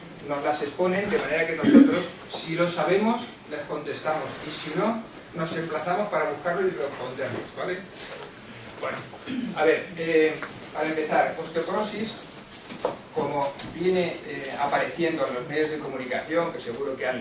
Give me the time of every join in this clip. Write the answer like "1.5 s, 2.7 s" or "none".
1.9 s